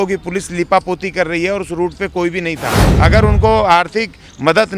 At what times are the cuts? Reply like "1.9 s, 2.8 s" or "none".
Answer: 2.8 s